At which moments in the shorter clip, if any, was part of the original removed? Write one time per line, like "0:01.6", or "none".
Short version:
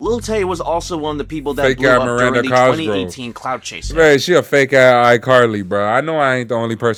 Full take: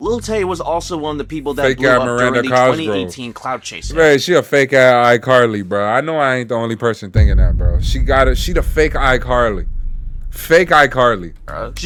none